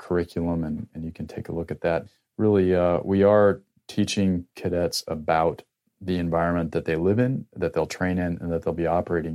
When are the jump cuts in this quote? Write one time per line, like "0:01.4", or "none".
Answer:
0:00.9
0:02.0